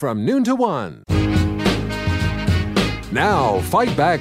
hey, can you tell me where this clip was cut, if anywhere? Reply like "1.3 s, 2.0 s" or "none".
0.9 s